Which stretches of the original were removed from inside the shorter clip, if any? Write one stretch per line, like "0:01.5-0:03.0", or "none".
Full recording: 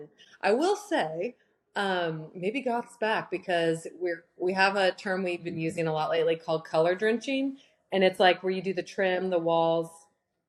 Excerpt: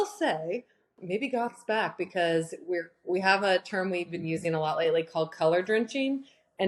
0:01.6-0:02.2